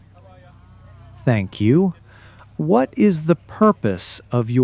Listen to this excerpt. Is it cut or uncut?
cut